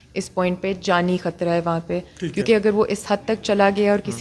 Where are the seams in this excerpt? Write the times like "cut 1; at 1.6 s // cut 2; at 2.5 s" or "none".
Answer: none

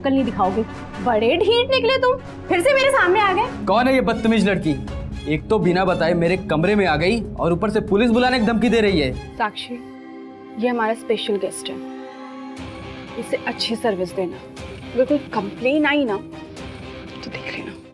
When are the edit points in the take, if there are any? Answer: cut 1; at 3.6 s // cut 2; at 9.3 s

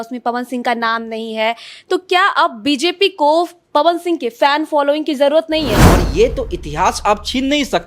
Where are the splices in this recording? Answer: cut 1; at 5.8 s

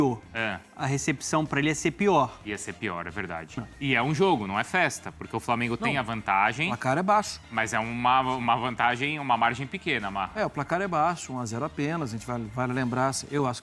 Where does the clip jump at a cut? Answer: cut 1; at 3.6 s

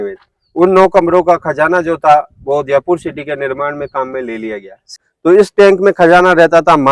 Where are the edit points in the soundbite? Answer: cut 1; at 4.8 s

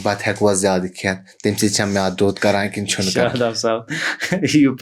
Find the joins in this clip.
none

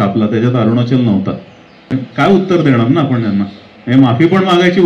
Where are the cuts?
cut 1; at 1.8 s

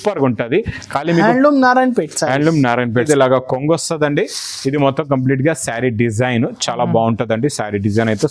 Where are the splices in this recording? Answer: cut 1; at 3.0 s

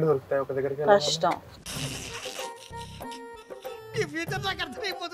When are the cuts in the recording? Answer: none

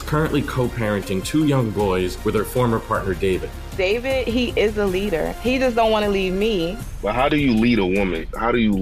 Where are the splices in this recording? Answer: none

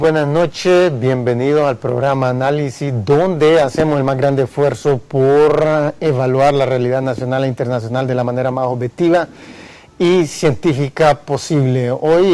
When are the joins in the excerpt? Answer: cut 1; at 9.8 s

